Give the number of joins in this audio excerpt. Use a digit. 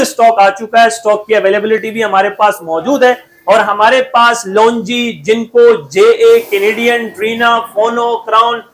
0